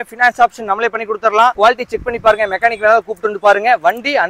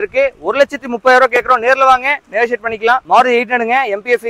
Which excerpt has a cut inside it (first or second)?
second